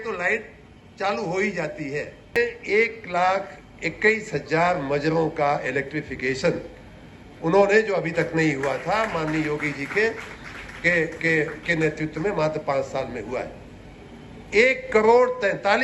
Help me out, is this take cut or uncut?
cut